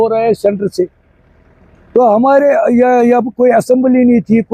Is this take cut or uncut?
uncut